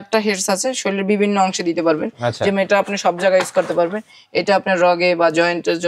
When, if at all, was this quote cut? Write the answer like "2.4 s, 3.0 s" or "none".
none